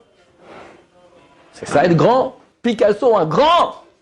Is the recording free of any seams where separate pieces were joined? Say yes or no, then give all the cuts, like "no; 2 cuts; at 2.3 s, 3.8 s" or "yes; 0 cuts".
no; 1 cut; at 2.5 s